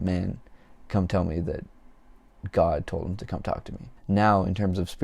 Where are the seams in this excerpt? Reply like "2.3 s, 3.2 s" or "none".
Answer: 3.8 s